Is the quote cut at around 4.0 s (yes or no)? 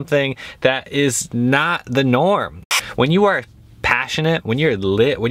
no